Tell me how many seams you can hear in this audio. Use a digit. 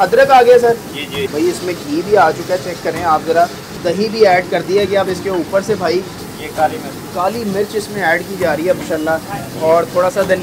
4